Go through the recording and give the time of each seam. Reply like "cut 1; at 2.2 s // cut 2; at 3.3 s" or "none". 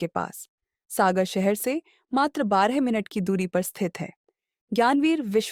none